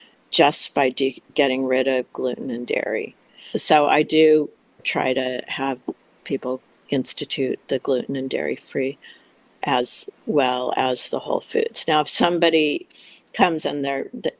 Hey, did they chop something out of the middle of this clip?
yes; 4 cuts; at 1.3 s, 3.5 s, 4.9 s, 6.7 s

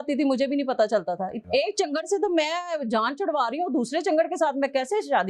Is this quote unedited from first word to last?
no; 1 cut; at 1.4 s

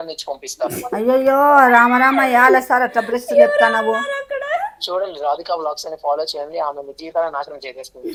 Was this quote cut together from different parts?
no; 0 cuts

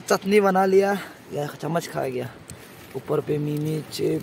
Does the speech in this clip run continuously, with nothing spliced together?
yes; 0 cuts

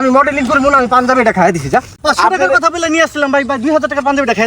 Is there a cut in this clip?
yes; 1 cut; at 2.0 s

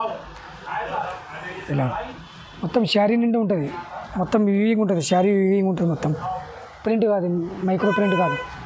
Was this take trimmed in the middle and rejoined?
no; 0 cuts

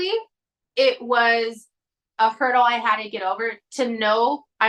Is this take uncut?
yes; 0 cuts

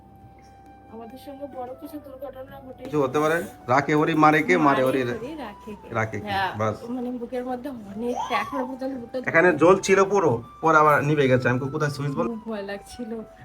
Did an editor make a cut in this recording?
yes; 2 cuts; at 2.9 s, 12.2 s

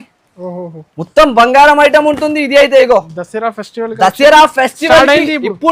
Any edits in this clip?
no; 0 cuts

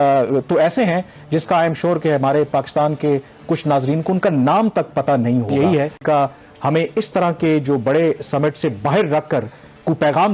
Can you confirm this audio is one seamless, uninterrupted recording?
no; 1 cut; at 6.0 s

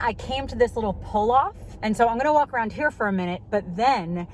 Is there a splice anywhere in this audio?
yes; 1 cut; at 1.7 s

